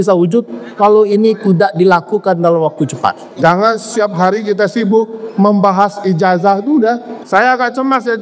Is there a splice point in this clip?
yes; 2 cuts; at 3.3 s, 7.1 s

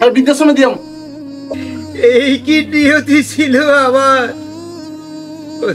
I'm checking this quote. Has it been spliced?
yes; 1 cut; at 1.5 s

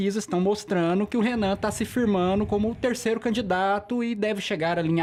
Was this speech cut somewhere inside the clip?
no; 0 cuts

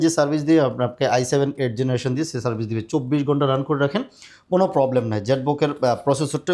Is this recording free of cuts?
yes; 0 cuts

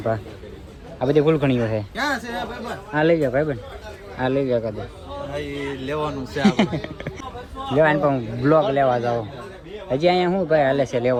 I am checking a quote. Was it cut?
no; 0 cuts

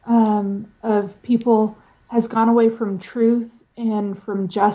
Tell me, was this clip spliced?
no; 0 cuts

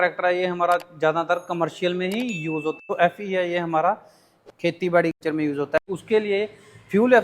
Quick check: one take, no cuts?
no; 2 cuts; at 2.8 s, 5.6 s

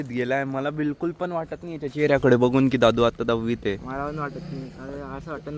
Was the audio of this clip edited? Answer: no; 0 cuts

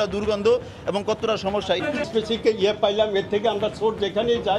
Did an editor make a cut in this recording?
yes; 1 cut; at 1.8 s

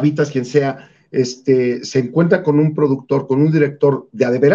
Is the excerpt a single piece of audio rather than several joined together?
yes; 0 cuts

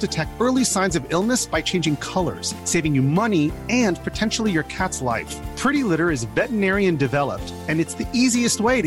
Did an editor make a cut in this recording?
no; 0 cuts

